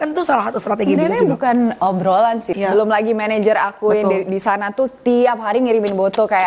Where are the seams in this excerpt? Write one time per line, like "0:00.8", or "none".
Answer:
0:02.5